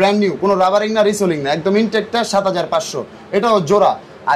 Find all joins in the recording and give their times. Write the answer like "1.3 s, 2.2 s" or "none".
none